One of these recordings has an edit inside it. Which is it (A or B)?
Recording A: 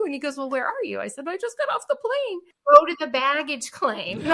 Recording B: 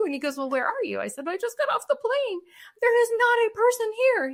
A